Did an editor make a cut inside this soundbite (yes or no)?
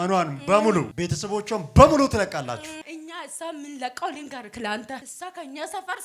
yes